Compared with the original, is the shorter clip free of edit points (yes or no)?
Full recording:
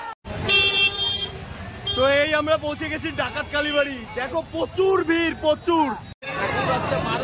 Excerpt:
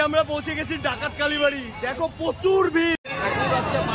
no